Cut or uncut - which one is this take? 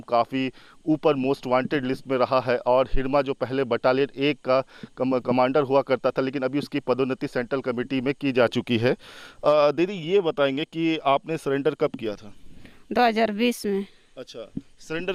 uncut